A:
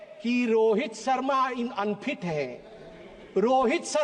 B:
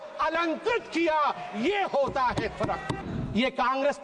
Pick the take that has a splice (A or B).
B